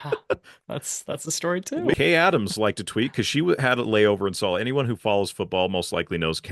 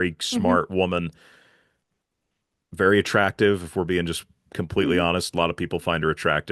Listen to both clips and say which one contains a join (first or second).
first